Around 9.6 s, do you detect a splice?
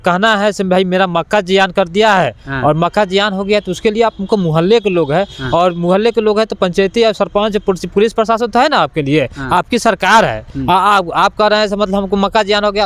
no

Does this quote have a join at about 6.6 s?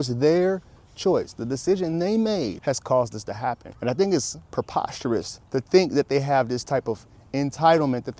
no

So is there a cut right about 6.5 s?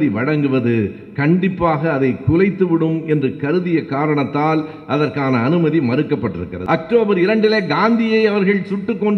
yes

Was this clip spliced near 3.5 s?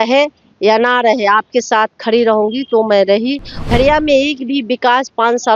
yes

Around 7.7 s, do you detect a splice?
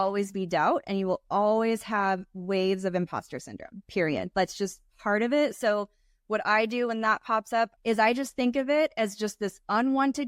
yes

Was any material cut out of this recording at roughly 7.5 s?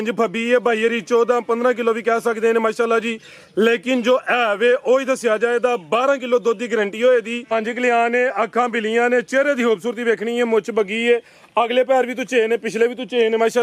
yes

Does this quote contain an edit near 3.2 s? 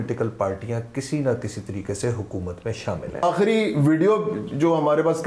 yes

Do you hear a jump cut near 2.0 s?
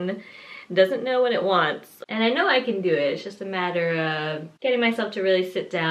yes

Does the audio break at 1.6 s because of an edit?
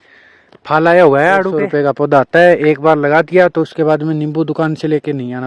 yes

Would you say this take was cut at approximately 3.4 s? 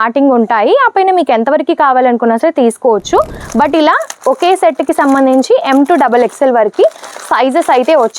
yes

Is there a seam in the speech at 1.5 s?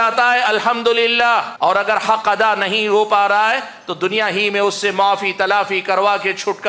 yes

